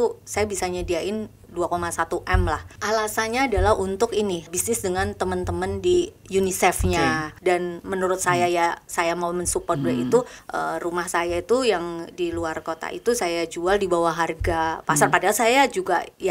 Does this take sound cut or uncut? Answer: cut